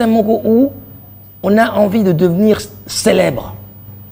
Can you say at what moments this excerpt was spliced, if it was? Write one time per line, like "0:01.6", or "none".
none

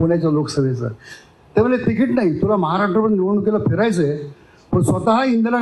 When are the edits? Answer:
none

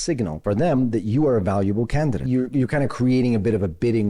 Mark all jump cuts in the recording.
0:02.2

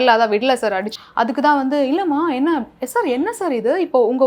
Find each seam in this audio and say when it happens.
0:00.9

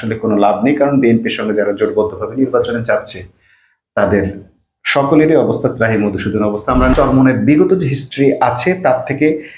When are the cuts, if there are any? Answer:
0:06.9

